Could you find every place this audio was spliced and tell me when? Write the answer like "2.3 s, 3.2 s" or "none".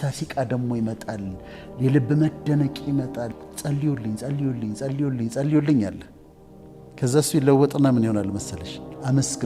3.5 s